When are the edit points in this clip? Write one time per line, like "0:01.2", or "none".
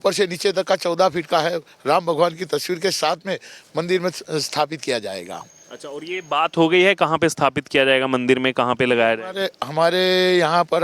none